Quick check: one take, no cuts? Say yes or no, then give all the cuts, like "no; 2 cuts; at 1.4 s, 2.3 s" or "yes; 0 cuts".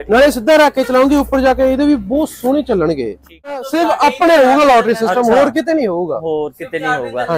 no; 1 cut; at 3.7 s